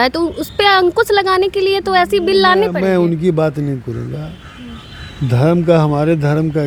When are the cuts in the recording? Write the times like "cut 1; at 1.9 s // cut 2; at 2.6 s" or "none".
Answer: none